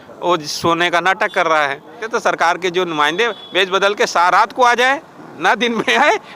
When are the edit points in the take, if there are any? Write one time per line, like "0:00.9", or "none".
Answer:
0:02.0